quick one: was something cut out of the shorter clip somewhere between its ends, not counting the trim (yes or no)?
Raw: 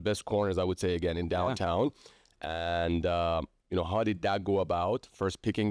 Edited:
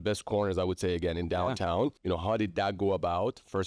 yes